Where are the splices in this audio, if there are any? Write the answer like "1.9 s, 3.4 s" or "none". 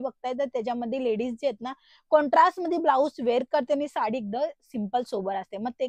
none